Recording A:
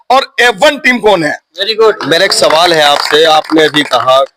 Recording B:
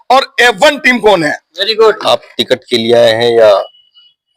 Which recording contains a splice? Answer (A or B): B